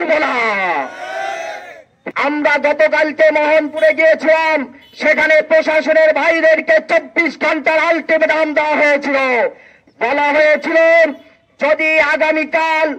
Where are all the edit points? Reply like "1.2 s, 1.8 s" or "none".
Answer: 2.0 s